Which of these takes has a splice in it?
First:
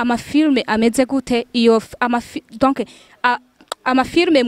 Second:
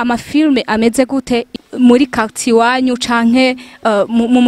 second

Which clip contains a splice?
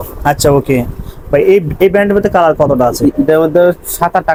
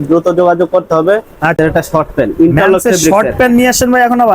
second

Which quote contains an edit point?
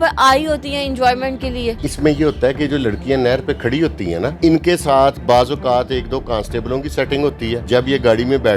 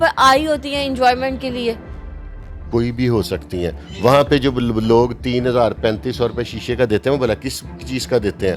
first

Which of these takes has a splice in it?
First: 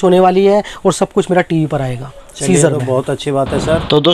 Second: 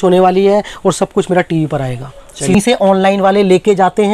second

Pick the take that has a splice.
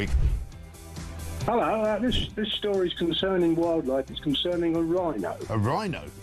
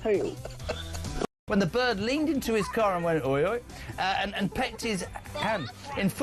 second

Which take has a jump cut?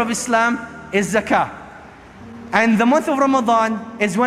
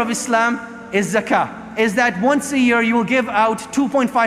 second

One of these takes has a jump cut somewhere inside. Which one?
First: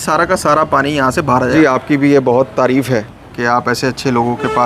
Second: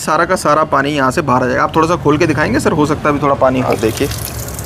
first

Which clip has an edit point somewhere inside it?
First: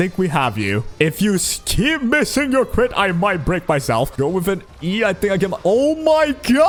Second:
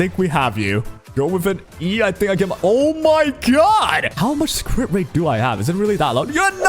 second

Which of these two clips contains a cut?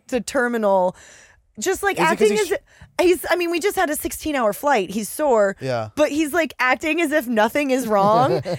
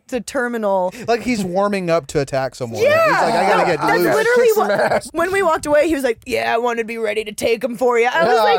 second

